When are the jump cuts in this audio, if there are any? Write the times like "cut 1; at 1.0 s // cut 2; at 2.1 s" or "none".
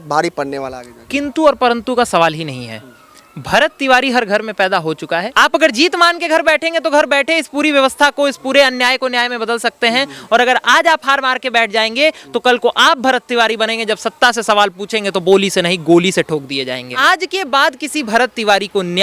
cut 1; at 5.3 s // cut 2; at 16.9 s

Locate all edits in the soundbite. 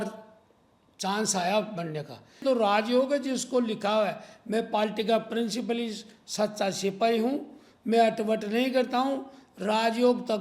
cut 1; at 2.4 s

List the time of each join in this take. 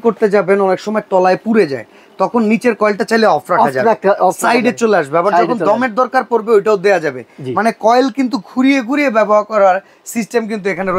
none

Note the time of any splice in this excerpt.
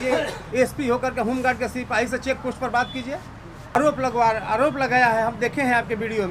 cut 1; at 3.8 s

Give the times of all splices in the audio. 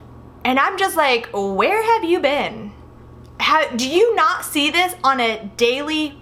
none

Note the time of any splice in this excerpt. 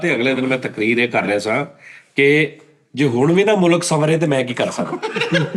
none

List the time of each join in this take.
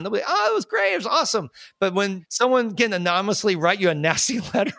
cut 1; at 1.9 s

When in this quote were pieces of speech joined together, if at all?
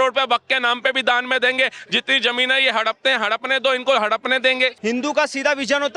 cut 1; at 4.8 s

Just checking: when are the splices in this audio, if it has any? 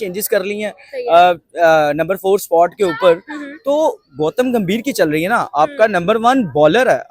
none

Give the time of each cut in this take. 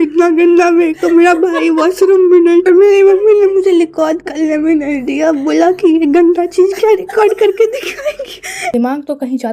cut 1; at 2.6 s // cut 2; at 8.7 s

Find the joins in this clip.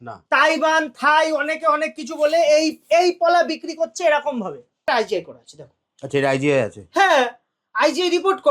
cut 1; at 4.8 s

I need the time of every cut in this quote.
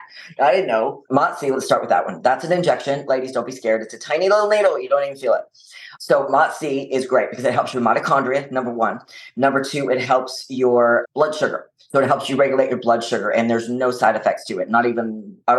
cut 1; at 1.0 s

